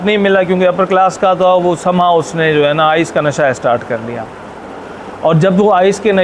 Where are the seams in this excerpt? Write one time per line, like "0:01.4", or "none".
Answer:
none

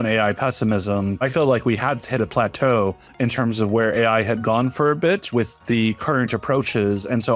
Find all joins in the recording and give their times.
0:01.2
0:05.5

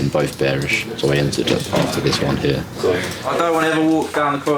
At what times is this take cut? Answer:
0:03.2

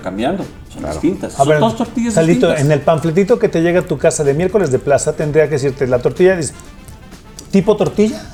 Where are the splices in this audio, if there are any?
none

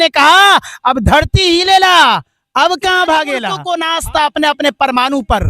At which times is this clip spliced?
0:03.5

